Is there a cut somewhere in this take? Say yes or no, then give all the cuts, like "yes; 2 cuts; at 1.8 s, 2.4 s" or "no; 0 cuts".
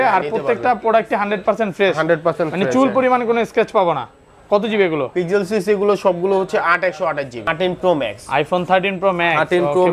yes; 1 cut; at 7.4 s